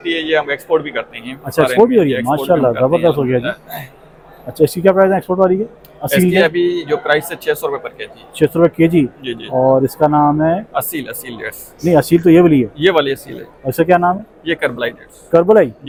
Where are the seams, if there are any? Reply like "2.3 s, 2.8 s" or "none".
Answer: none